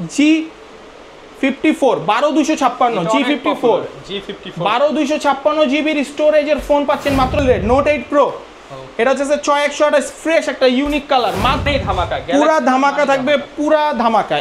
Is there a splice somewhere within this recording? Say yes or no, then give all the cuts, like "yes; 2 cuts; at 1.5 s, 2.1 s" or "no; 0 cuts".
yes; 2 cuts; at 7.4 s, 11.7 s